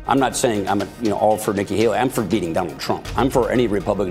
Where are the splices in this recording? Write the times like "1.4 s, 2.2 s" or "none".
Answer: none